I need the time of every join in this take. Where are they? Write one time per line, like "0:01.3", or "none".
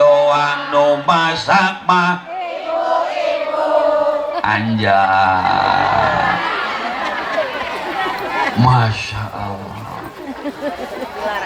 none